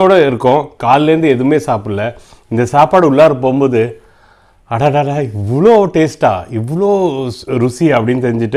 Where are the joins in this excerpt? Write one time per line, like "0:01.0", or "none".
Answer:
none